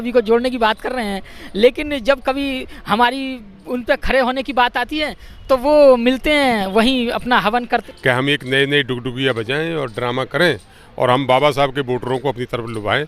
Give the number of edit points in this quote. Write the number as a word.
one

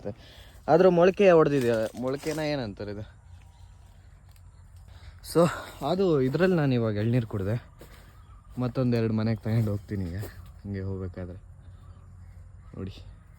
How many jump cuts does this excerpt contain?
one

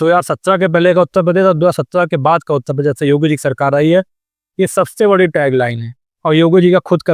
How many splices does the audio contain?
zero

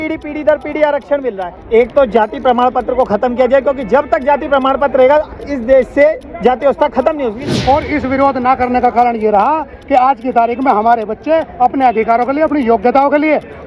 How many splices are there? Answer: two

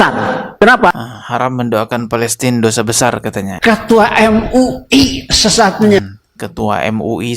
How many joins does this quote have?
one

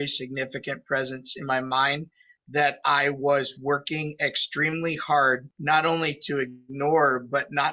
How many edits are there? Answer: one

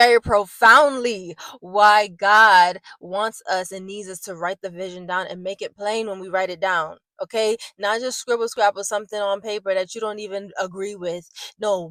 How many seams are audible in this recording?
zero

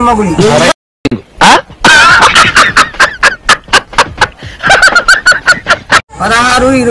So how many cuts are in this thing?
two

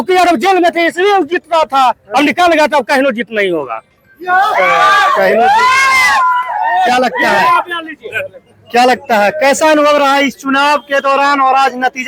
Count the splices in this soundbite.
zero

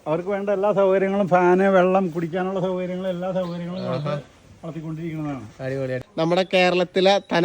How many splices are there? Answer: one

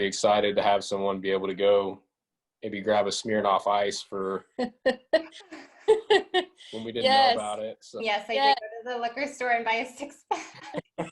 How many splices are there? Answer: two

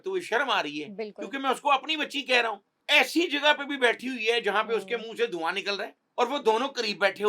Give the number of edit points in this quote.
two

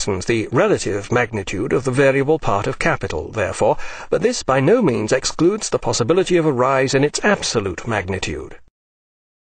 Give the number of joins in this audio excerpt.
one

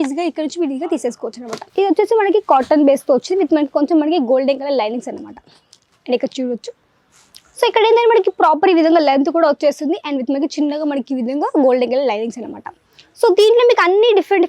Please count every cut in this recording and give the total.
one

